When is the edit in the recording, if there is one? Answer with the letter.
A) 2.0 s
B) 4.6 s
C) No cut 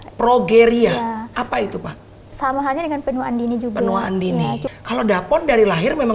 B